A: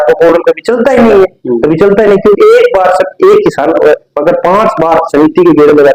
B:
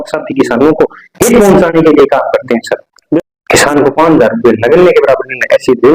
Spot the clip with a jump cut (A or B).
B